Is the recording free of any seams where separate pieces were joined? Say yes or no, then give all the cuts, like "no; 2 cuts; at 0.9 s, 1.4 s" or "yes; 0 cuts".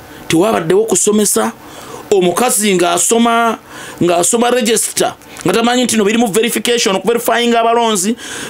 yes; 0 cuts